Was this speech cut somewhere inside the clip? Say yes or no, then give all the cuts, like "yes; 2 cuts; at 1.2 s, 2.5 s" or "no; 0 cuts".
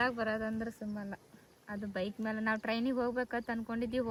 no; 0 cuts